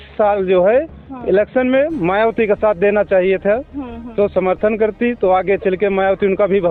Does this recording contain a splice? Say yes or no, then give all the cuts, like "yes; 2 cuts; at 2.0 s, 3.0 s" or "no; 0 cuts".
no; 0 cuts